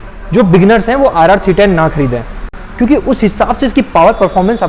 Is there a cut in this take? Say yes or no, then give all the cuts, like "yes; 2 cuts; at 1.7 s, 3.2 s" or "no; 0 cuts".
no; 0 cuts